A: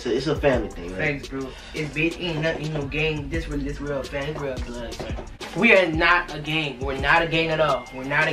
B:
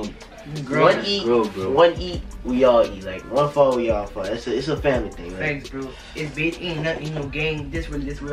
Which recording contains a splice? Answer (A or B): A